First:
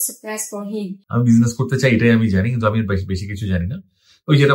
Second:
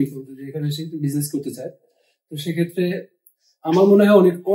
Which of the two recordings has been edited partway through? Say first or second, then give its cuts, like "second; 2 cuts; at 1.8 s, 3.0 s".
first; 1 cut; at 1.0 s